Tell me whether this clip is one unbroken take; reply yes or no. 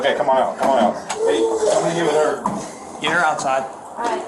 no